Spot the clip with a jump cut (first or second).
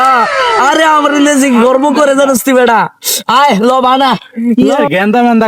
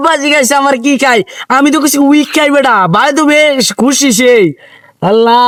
first